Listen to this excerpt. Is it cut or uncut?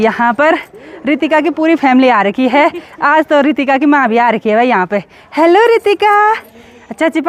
uncut